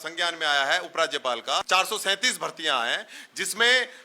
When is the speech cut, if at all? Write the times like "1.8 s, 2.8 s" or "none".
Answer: 1.6 s